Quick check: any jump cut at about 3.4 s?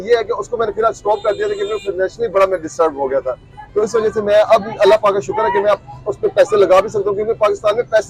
no; 0 cuts

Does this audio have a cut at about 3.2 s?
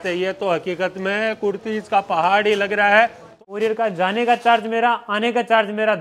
yes; 1 cut; at 3.2 s

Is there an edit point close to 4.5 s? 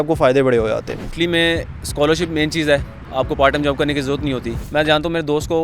yes; 2 cuts; at 1.0 s, 4.5 s

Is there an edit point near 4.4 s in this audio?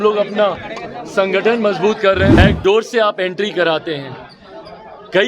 no; 1 cut; at 2.4 s

